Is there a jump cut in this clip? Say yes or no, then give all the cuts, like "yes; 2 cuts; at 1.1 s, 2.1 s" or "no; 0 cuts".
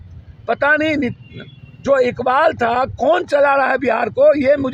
no; 0 cuts